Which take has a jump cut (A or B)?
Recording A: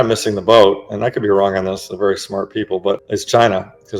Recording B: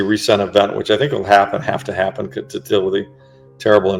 A